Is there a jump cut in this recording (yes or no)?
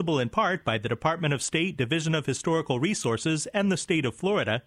no